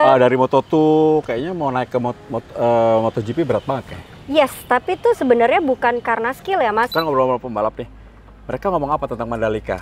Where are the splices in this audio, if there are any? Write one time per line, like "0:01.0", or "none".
0:06.9